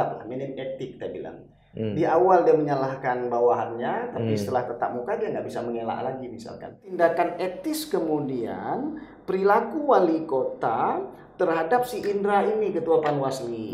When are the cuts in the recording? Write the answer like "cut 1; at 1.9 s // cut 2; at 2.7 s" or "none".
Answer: cut 1; at 6.9 s